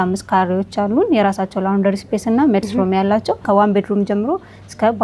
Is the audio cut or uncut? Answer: cut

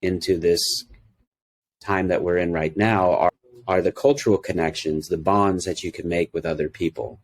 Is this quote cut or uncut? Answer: cut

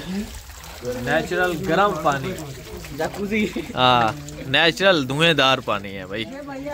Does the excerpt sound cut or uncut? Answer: uncut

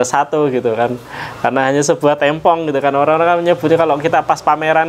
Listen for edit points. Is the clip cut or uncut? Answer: uncut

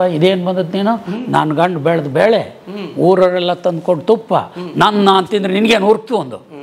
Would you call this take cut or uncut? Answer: uncut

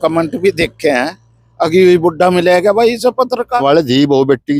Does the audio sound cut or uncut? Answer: cut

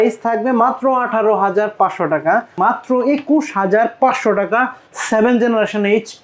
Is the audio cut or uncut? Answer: cut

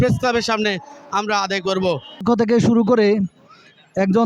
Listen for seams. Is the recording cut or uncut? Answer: cut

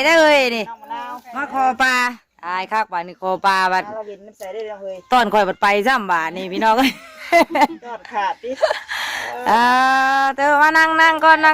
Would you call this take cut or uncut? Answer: uncut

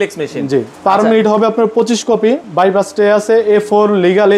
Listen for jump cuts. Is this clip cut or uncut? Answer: cut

